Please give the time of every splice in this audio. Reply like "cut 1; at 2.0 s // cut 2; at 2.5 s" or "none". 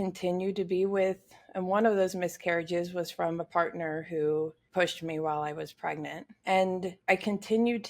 cut 1; at 4.6 s // cut 2; at 6.3 s // cut 3; at 6.9 s